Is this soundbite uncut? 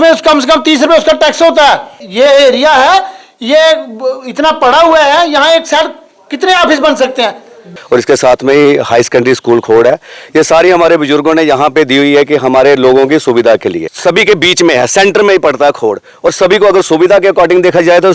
no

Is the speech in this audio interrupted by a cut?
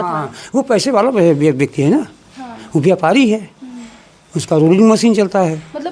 no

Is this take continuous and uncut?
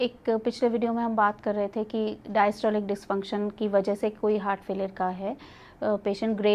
yes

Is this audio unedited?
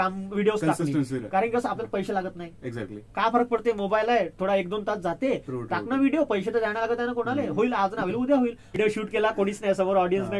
no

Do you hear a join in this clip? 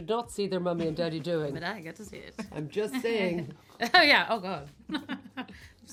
no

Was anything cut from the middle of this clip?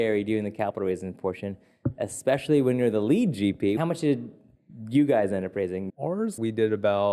yes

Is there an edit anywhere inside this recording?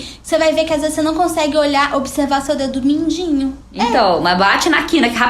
yes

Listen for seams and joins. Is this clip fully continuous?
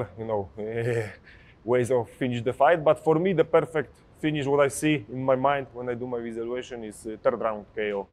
yes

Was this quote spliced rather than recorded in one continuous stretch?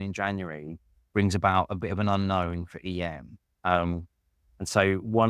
no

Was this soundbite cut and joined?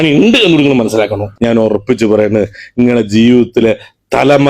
yes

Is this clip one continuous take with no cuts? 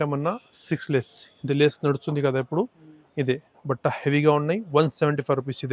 yes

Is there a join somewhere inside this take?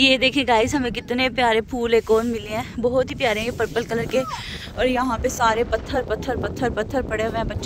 no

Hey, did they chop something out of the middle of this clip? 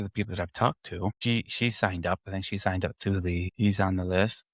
no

